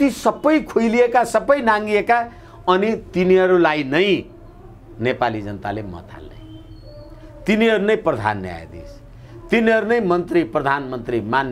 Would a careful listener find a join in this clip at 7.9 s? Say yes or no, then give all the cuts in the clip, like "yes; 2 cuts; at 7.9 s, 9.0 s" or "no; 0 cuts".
no; 0 cuts